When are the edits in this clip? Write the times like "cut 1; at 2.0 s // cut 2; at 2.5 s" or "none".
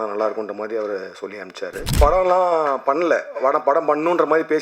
cut 1; at 2.0 s

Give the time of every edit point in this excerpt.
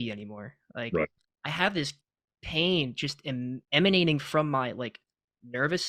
cut 1; at 1.3 s

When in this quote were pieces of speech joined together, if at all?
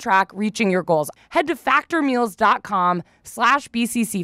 cut 1; at 1.1 s

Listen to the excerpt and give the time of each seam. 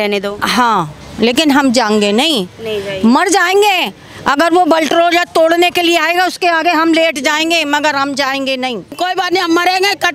cut 1; at 9.0 s

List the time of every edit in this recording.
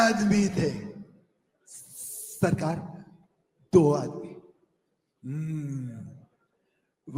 none

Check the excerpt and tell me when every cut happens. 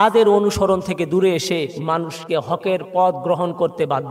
cut 1; at 2.2 s

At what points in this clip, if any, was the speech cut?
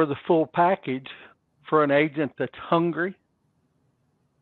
none

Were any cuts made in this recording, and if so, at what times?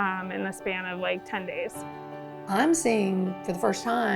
cut 1; at 1.8 s

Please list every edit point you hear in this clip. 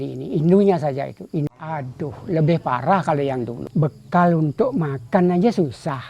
cut 1; at 1.5 s // cut 2; at 3.6 s

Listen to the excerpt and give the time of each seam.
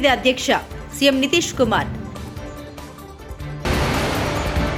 none

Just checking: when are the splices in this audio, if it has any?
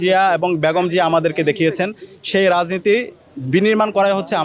none

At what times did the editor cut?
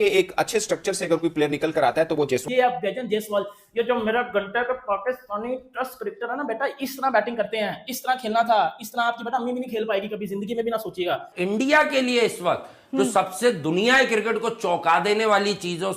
cut 1; at 2.4 s // cut 2; at 11.3 s

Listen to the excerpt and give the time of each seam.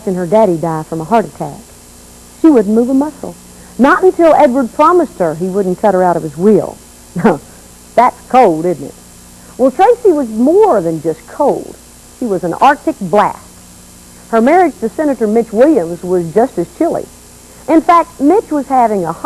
none

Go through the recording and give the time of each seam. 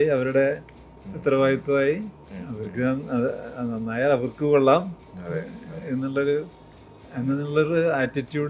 none

